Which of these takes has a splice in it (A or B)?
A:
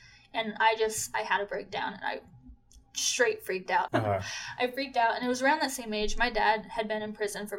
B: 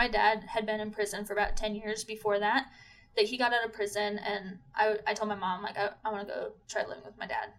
A